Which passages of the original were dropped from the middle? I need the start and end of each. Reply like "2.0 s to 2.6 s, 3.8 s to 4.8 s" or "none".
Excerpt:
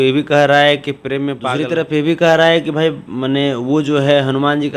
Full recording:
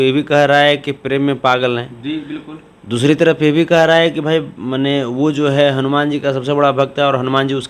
1.5 s to 3.0 s